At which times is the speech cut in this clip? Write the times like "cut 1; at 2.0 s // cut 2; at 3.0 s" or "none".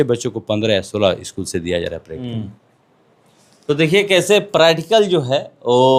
none

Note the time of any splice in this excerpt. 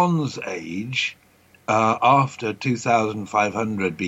none

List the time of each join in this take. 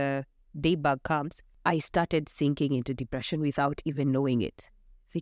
none

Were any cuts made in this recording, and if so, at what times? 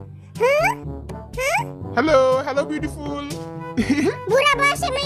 none

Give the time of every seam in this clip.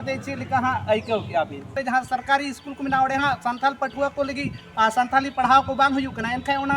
cut 1; at 1.7 s

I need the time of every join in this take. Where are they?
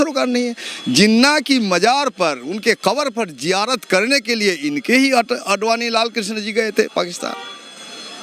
none

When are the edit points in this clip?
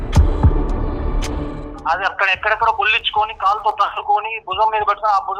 cut 1; at 1.8 s

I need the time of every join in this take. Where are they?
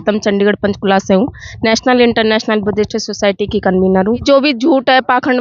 cut 1; at 4.2 s

